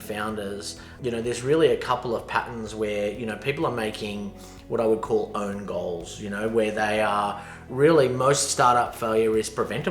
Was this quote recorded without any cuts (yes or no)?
no